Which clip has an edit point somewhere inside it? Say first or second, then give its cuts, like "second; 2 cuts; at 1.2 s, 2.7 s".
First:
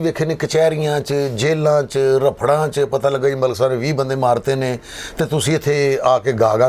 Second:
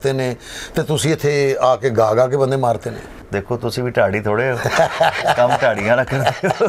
second; 1 cut; at 3.2 s